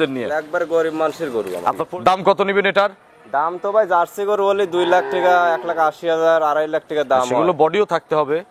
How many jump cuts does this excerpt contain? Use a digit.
1